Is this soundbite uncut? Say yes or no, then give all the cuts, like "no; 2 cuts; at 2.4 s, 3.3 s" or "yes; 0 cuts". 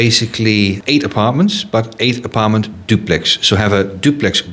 yes; 0 cuts